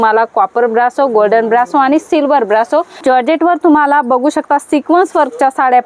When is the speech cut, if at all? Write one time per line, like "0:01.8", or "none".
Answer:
0:03.0

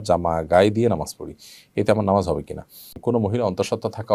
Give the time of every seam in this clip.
0:03.0

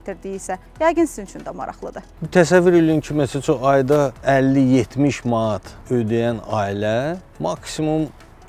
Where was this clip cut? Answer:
0:02.1

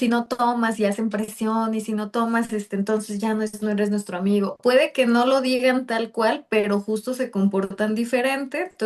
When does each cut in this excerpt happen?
0:04.5

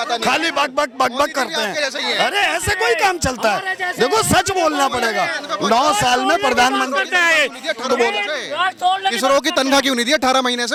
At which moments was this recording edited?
none

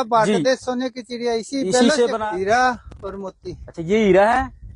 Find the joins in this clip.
0:02.2

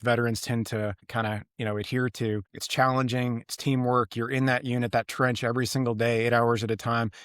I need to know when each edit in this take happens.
0:01.0
0:02.6

